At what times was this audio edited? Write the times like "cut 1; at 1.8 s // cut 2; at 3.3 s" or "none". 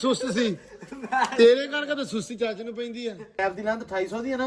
cut 1; at 3.4 s

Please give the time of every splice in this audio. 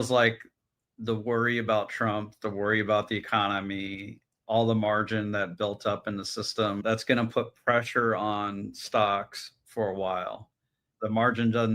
cut 1; at 6.8 s

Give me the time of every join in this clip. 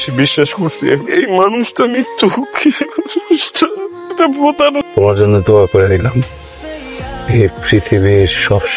cut 1; at 4.8 s

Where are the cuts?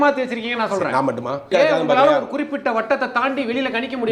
cut 1; at 1.5 s

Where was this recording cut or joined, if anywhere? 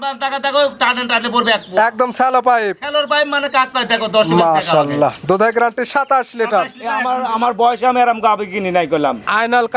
cut 1; at 6.9 s

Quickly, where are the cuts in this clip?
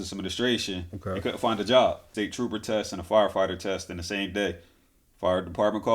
cut 1; at 2.1 s

